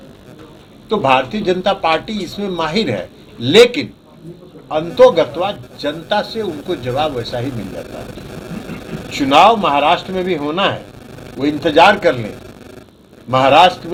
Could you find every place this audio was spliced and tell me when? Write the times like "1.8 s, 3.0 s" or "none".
none